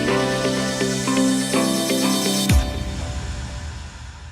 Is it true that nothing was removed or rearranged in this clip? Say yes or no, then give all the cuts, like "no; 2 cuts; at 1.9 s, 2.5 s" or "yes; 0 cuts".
no; 1 cut; at 1.4 s